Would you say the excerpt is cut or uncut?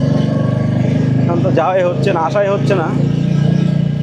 uncut